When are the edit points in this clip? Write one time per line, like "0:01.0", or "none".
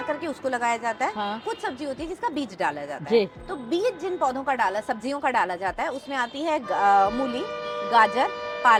none